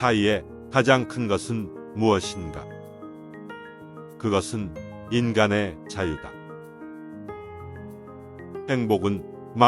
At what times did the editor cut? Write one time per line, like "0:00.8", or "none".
0:06.8
0:08.7